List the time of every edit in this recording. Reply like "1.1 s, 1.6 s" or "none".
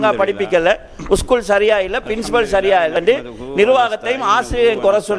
3.0 s